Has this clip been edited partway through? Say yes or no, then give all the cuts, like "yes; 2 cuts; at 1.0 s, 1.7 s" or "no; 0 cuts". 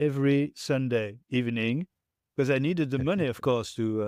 no; 0 cuts